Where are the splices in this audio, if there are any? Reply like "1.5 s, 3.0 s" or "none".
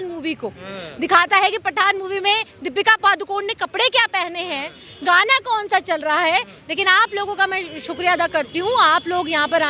none